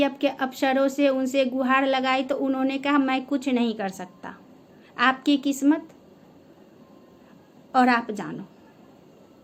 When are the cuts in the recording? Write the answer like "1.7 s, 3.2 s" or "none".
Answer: none